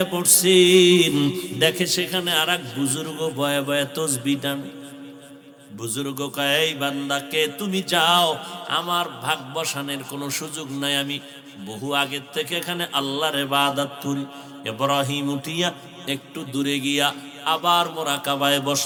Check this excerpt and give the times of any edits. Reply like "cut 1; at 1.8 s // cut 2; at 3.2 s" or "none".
none